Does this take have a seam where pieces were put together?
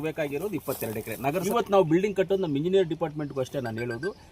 yes; 1 cut; at 1.5 s

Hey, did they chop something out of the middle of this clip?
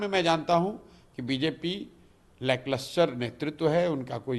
no; 0 cuts

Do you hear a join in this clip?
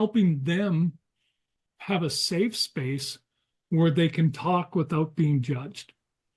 no; 0 cuts

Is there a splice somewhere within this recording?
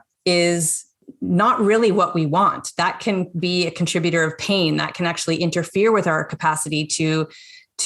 yes; 1 cut; at 1.1 s

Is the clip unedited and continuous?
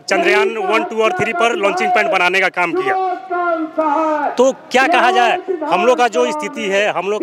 yes; 0 cuts

